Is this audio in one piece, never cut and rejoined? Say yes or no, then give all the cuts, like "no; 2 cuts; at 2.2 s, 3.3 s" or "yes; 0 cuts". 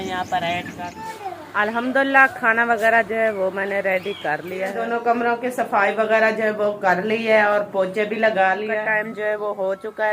no; 3 cuts; at 1.2 s, 4.8 s, 8.7 s